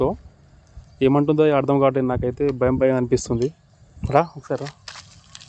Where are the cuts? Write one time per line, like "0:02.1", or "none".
none